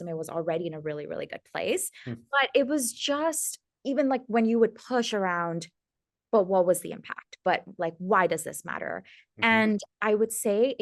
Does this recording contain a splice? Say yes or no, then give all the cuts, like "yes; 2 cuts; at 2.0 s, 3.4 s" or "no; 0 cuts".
no; 0 cuts